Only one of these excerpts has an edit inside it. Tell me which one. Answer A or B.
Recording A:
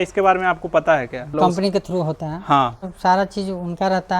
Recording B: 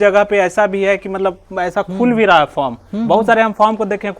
A